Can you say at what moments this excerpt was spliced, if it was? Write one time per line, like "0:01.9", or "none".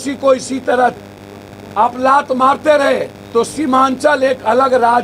0:03.2